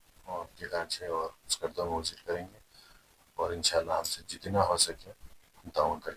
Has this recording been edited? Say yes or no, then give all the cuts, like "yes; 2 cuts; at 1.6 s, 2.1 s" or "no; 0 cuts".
no; 0 cuts